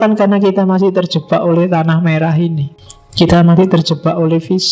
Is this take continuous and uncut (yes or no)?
no